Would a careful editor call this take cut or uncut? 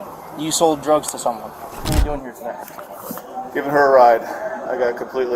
cut